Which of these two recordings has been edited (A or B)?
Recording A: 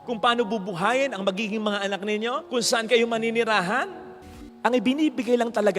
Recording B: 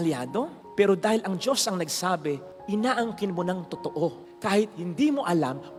A